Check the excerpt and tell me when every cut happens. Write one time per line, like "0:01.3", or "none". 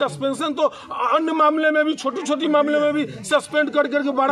none